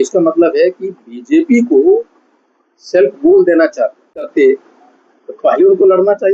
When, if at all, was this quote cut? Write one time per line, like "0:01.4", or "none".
0:04.1